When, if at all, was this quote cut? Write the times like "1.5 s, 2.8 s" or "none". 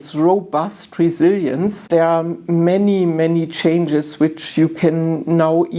1.8 s